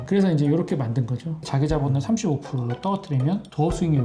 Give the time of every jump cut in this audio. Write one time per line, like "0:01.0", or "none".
0:01.4